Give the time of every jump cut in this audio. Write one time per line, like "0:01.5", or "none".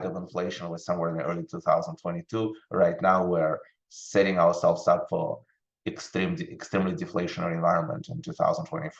none